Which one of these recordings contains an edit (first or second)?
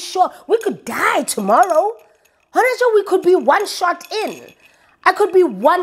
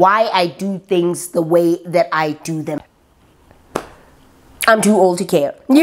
second